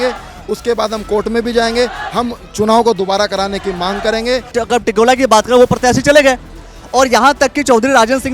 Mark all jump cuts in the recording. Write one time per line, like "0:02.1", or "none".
0:04.5